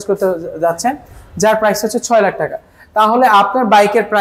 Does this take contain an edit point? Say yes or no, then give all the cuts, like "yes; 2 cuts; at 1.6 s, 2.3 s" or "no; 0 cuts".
no; 0 cuts